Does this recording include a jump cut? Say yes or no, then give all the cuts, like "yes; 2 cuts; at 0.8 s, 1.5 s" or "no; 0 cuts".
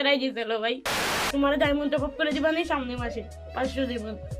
yes; 1 cut; at 1.2 s